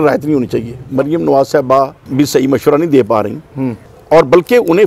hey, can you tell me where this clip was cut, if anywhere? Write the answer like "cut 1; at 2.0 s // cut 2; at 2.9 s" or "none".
cut 1; at 0.8 s // cut 2; at 2.0 s // cut 3; at 3.9 s